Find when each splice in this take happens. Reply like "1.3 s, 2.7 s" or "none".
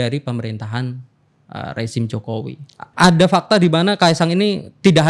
2.8 s